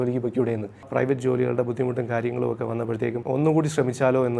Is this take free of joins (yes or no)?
no